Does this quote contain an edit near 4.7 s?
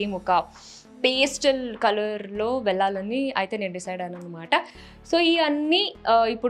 no; 0 cuts

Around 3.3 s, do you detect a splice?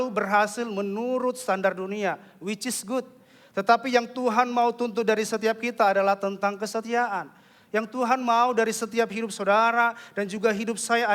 no; 0 cuts

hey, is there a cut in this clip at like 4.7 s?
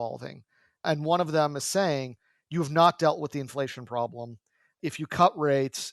yes; 1 cut; at 4.7 s

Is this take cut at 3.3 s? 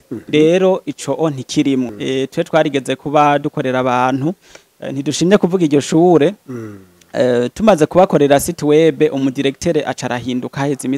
no; 1 cut; at 1.9 s

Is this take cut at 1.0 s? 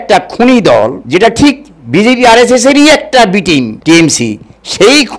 yes; 2 cuts; at 1.0 s, 3.7 s

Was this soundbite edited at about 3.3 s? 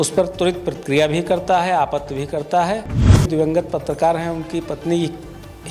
yes; 1 cut; at 3.3 s

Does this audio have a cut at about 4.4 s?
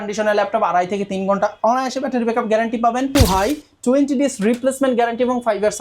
no; 1 cut; at 3.2 s

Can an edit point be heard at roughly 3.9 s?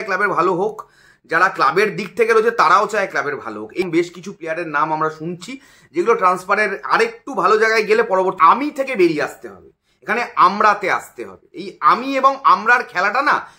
yes; 2 cuts; at 3.9 s, 8.4 s

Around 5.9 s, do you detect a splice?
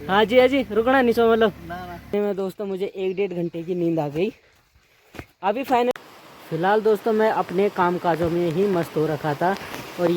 yes; 2 cuts; at 2.1 s, 5.9 s

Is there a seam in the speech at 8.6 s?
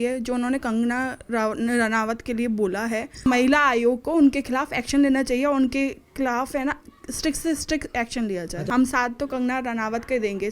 yes; 2 cuts; at 3.1 s, 8.6 s

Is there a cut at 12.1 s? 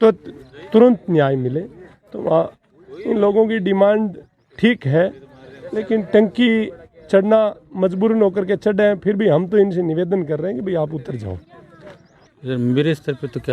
yes; 1 cut; at 12.1 s

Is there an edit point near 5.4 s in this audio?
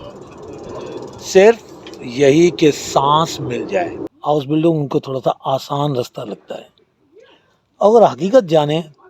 no; 1 cut; at 4.1 s

